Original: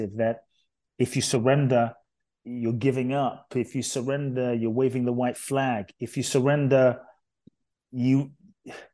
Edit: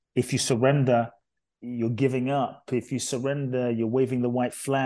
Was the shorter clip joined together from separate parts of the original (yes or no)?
no